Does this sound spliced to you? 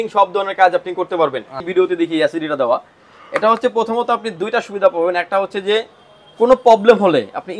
yes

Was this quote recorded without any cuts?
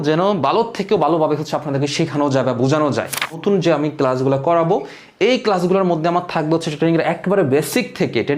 no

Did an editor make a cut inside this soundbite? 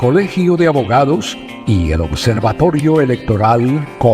no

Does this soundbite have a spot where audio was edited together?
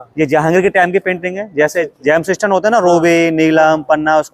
no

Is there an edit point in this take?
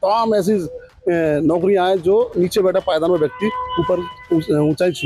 no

